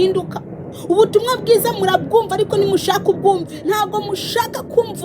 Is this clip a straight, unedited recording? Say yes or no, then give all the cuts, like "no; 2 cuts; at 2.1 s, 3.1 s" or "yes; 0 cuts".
no; 1 cut; at 3.5 s